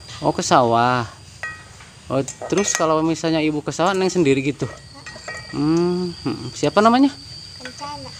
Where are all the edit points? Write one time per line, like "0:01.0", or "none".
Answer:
none